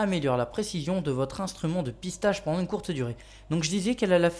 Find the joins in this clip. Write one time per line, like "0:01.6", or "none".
0:03.1